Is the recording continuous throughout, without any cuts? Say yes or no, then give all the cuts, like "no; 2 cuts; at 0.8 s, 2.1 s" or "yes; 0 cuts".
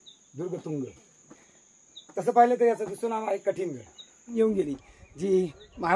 no; 1 cut; at 4.3 s